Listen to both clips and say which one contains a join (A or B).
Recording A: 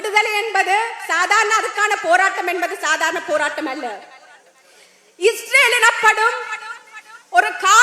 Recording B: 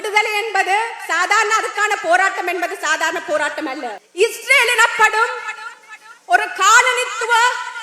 B